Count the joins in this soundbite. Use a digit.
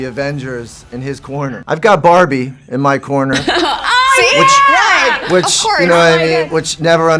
1